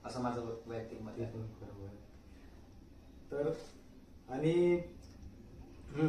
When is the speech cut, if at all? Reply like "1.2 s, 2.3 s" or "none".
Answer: none

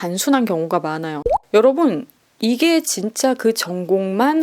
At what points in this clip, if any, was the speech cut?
1.3 s

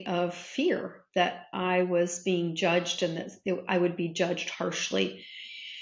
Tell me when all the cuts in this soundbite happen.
none

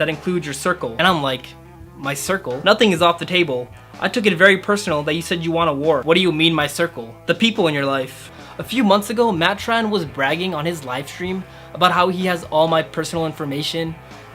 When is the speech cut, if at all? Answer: 6.0 s, 8.3 s

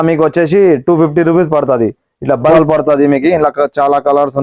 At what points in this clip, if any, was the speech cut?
2.5 s

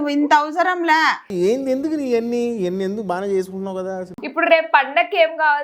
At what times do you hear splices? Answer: 4.2 s

